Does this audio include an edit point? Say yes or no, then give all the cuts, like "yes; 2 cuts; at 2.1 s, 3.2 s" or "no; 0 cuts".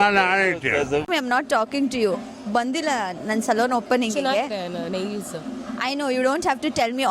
yes; 1 cut; at 1.1 s